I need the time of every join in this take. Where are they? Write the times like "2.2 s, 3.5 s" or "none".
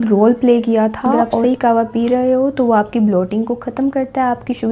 1.4 s